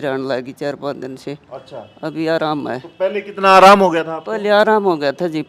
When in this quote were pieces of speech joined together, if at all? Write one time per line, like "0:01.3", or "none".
none

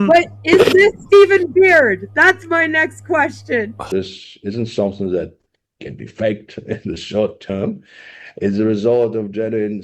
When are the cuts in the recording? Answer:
0:03.9

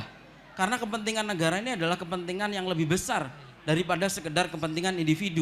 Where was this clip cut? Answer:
none

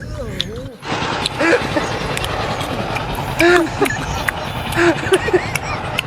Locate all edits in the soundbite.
none

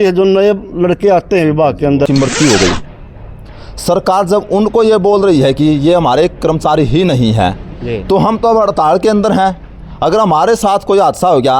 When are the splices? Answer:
0:02.1

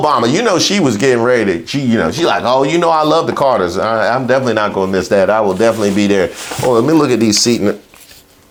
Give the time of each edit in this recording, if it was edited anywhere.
none

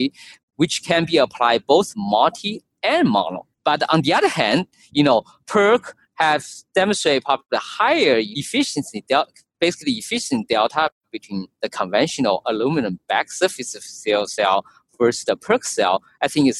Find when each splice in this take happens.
0:03.5
0:08.3

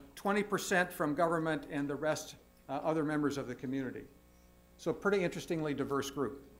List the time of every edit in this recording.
none

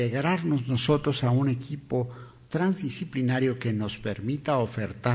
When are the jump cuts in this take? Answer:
0:04.2

